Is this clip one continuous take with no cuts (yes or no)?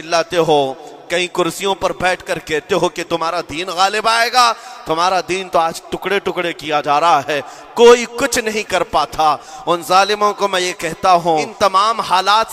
no